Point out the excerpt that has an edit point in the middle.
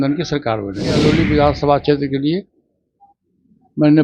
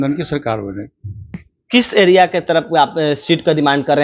first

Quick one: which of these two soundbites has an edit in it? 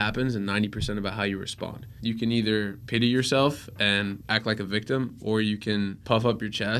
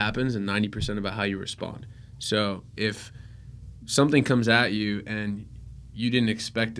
first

